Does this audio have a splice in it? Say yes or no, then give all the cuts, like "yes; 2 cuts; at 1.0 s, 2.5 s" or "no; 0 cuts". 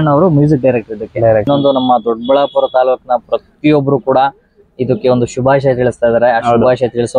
yes; 1 cut; at 1.5 s